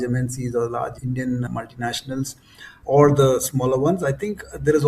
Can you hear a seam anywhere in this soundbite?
no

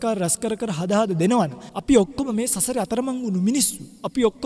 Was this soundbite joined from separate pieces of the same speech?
no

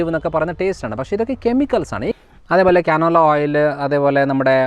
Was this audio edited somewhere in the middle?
yes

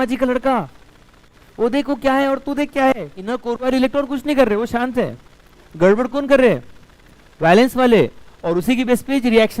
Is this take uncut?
no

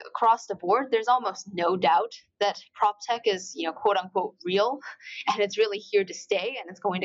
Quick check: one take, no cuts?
yes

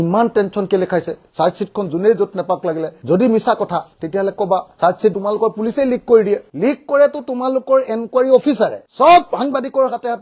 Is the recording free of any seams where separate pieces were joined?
yes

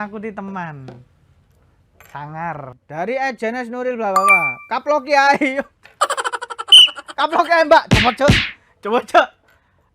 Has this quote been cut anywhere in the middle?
yes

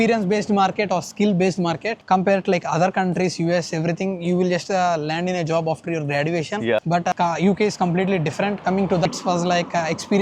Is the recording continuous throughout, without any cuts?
yes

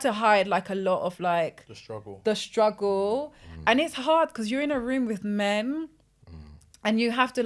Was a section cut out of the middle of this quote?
no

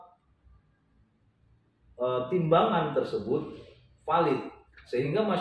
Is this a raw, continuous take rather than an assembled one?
yes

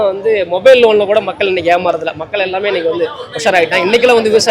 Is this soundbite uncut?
yes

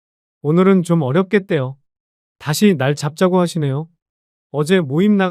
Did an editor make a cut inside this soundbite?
no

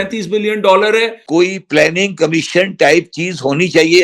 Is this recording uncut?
no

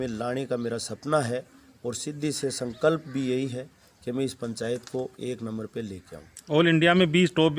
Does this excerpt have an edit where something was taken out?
no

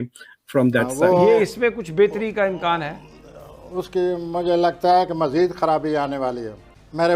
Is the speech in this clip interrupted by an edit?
yes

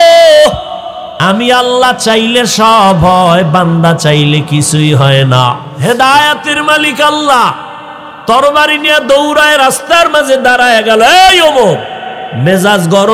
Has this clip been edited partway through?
yes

